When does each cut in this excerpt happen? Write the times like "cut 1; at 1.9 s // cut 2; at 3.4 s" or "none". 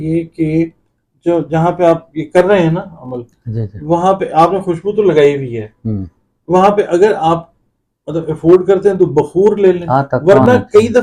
cut 1; at 9.8 s